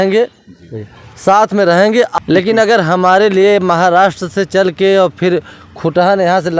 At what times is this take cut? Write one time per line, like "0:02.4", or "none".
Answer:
none